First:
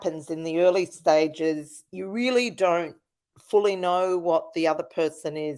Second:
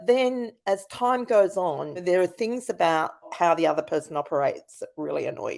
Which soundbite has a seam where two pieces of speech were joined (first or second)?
second